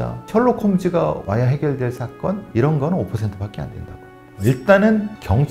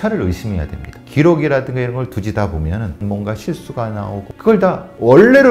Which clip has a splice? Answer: second; 3 cuts; at 1.0 s, 3.0 s, 4.3 s

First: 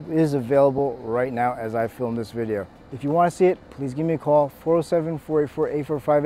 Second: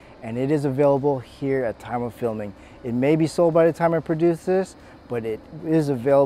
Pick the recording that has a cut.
first; 1 cut; at 2.8 s

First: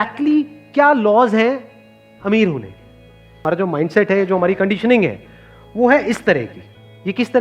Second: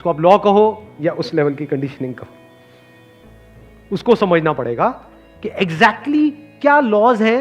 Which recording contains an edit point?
first; 1 cut; at 3.4 s

